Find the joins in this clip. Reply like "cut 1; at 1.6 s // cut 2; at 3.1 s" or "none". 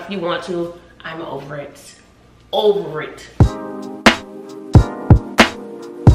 cut 1; at 3.3 s